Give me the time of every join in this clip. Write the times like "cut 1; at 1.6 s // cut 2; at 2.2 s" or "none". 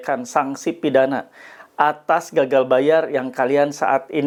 none